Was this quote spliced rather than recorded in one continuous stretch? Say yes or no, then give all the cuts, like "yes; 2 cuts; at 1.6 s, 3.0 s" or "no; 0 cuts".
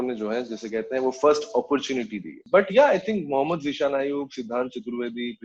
no; 0 cuts